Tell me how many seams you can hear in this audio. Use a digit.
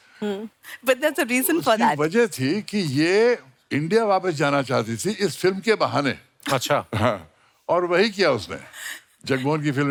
0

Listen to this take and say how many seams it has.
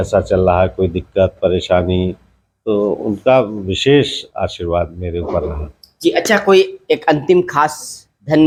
0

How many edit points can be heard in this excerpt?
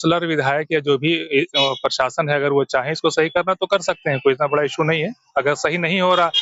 0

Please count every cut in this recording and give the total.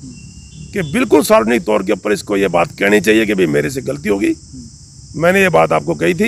0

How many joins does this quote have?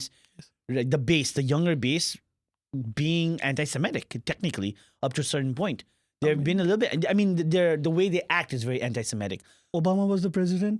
1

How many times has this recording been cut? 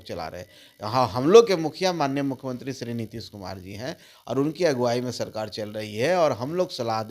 0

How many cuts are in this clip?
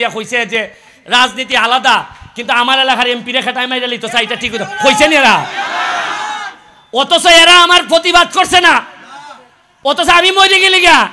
0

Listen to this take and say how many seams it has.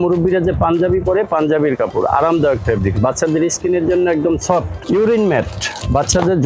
1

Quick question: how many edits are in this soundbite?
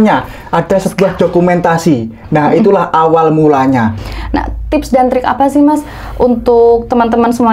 1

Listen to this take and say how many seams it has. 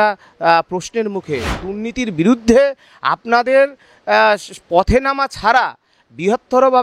1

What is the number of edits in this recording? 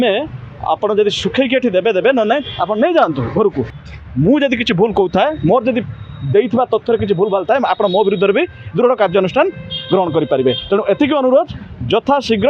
1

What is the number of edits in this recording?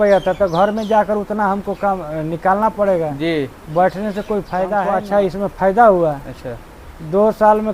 1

